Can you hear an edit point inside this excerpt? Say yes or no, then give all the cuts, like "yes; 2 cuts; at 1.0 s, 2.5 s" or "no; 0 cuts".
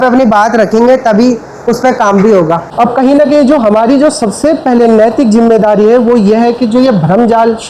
yes; 1 cut; at 2.7 s